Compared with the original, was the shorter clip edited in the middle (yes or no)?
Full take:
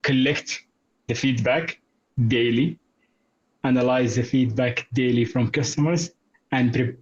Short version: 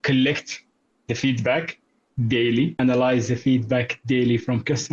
yes